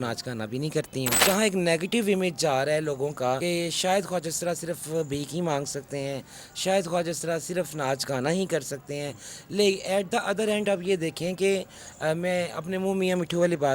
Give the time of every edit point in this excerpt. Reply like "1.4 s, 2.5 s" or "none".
1.2 s, 3.4 s